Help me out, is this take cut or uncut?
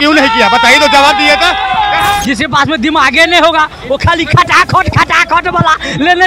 cut